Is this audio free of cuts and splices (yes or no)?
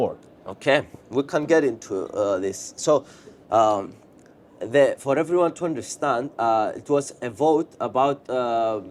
yes